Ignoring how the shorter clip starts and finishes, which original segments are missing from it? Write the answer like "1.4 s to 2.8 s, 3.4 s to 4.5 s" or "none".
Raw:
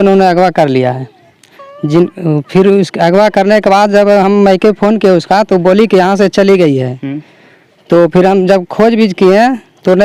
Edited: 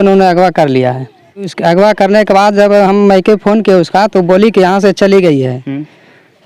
1.5 s to 2.9 s